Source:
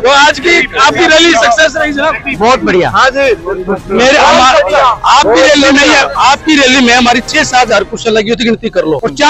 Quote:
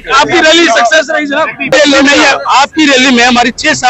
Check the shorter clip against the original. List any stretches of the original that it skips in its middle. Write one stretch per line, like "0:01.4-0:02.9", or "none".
0:02.4-0:05.4